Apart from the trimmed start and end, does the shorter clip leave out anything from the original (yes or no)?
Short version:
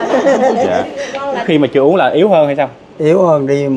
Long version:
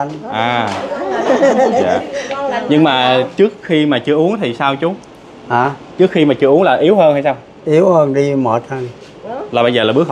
yes